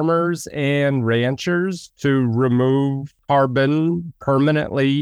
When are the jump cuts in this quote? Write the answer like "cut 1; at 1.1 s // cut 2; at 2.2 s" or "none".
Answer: cut 1; at 3.1 s // cut 2; at 4.1 s